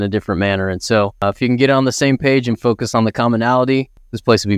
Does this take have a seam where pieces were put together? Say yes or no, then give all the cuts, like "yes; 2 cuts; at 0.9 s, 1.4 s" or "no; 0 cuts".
no; 0 cuts